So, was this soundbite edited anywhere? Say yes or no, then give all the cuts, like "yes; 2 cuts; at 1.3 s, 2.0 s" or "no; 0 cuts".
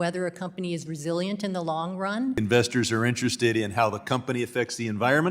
yes; 1 cut; at 2.4 s